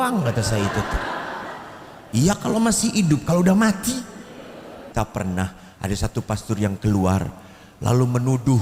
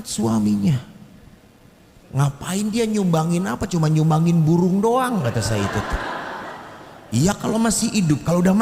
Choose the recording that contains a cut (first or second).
first